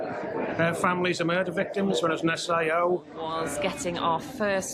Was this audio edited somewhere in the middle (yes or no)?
yes